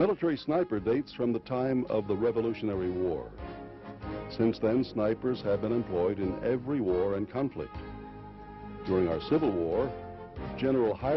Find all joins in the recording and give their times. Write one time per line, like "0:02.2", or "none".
0:08.0